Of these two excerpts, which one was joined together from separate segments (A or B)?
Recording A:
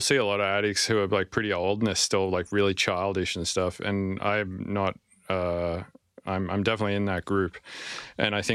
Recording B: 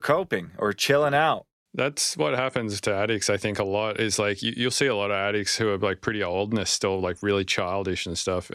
B